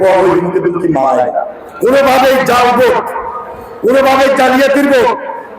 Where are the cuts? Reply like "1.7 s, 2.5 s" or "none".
1.6 s